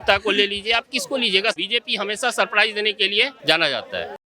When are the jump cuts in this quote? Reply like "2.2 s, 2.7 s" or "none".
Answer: 1.6 s, 3.4 s